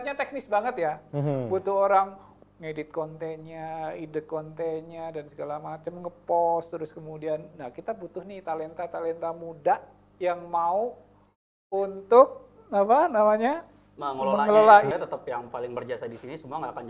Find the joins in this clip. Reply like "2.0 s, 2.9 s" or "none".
14.9 s